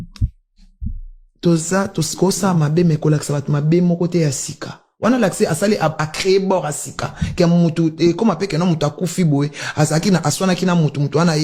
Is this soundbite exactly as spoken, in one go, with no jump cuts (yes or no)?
yes